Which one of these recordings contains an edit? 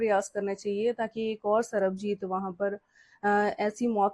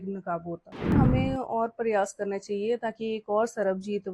second; 1 cut; at 0.9 s

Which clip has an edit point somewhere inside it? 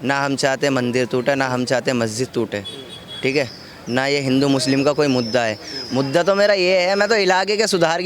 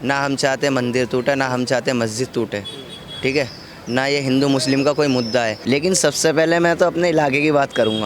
second; 1 cut; at 5.6 s

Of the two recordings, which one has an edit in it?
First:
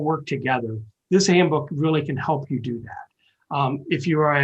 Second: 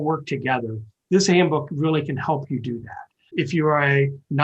second; 1 cut; at 3.3 s

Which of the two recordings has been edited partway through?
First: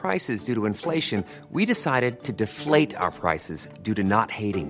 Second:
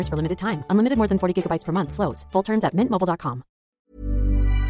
second; 1 cut; at 3.7 s

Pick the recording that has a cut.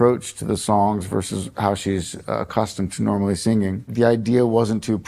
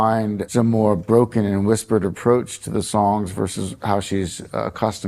first; 1 cut; at 3.8 s

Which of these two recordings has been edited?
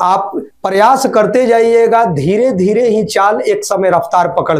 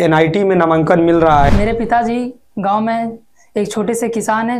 second; 1 cut; at 1.5 s

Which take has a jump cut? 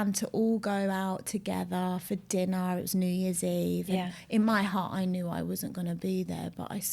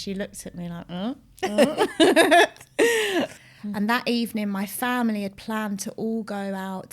second; 1 cut; at 3.3 s

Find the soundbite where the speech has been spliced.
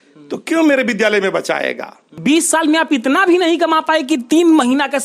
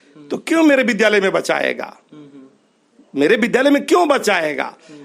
first; 1 cut; at 2.1 s

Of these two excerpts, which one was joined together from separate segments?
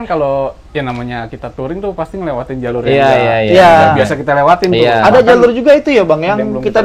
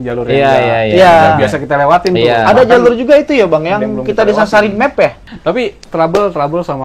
second; 1 cut; at 5.3 s

